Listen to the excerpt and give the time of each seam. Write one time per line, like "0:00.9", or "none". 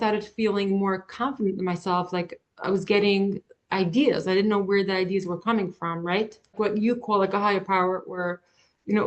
0:06.4